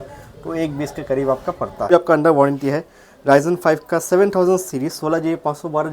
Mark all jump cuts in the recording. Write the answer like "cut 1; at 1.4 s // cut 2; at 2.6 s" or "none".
cut 1; at 1.9 s